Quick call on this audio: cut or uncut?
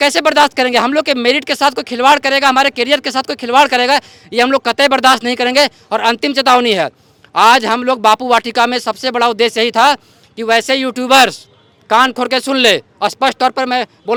uncut